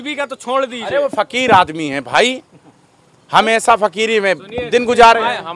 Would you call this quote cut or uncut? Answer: uncut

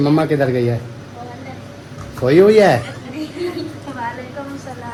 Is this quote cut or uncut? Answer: uncut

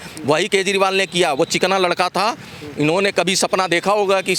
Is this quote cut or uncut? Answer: uncut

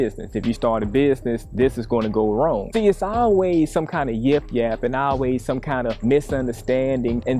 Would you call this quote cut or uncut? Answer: cut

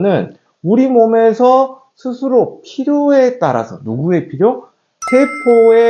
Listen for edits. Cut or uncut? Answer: uncut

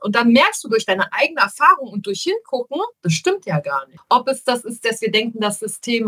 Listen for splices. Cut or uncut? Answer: cut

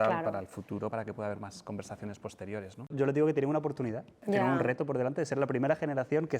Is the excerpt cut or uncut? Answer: cut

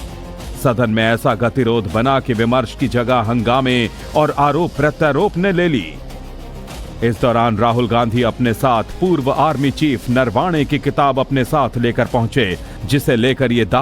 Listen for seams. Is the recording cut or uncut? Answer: cut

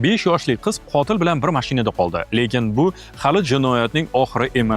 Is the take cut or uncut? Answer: uncut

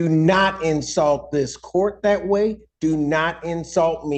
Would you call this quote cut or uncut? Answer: uncut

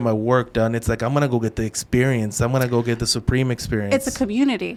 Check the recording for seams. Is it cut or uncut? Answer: uncut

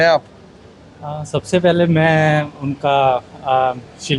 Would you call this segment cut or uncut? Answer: uncut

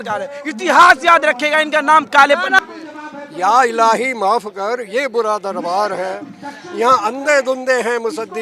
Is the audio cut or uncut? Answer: cut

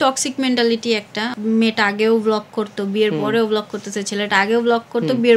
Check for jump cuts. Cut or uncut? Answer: cut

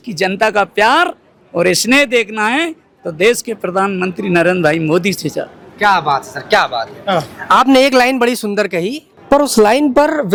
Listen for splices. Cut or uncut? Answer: uncut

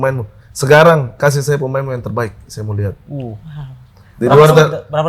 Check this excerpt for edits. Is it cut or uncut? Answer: uncut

